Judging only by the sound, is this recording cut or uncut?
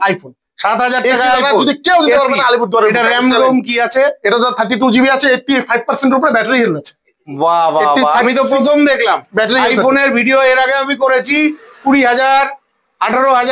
uncut